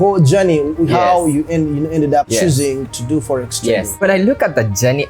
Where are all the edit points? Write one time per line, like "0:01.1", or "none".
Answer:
0:02.3
0:04.0